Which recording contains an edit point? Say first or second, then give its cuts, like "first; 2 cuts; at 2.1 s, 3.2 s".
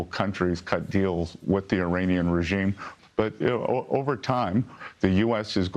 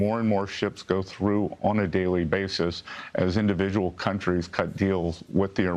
first; 1 cut; at 2.9 s